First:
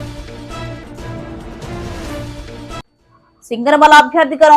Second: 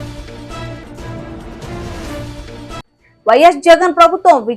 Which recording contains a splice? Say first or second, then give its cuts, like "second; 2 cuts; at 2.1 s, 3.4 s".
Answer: first; 1 cut; at 3.0 s